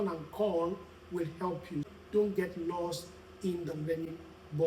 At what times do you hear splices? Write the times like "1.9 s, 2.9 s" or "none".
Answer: 1.9 s